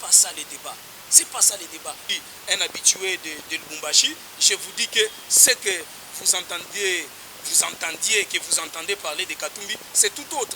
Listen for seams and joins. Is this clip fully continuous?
no; 1 cut; at 2.1 s

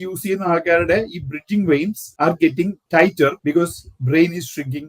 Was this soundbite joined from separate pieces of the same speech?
yes; 2 cuts; at 2.0 s, 3.3 s

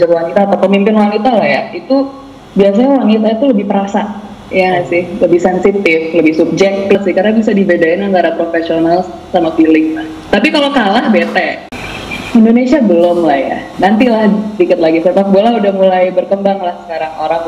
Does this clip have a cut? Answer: yes; 2 cuts; at 7.0 s, 11.7 s

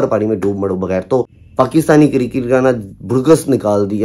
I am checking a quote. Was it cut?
yes; 1 cut; at 1.4 s

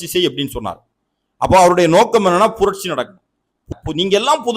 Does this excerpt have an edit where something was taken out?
yes; 1 cut; at 3.7 s

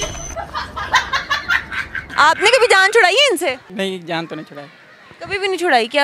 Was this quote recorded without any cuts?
no; 1 cut; at 2.0 s

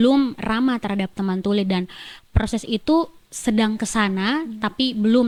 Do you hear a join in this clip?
no; 0 cuts

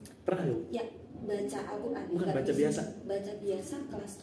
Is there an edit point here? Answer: no; 0 cuts

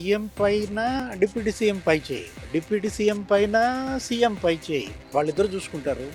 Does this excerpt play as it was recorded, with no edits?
yes; 0 cuts

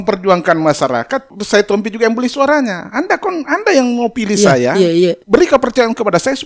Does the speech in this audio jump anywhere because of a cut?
yes; 2 cuts; at 1.3 s, 5.2 s

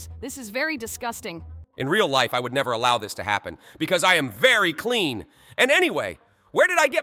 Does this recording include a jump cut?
no; 0 cuts

